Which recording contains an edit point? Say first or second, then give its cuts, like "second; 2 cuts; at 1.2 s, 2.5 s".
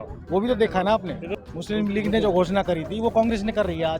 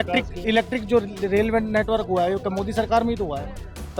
first; 1 cut; at 1.3 s